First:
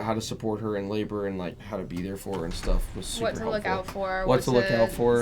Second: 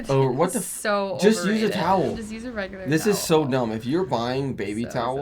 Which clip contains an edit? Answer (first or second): first